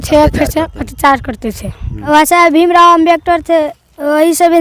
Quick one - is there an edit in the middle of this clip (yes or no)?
yes